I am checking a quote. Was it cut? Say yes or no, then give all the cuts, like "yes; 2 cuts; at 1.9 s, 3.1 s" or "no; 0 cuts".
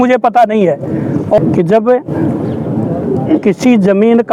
yes; 1 cut; at 1.4 s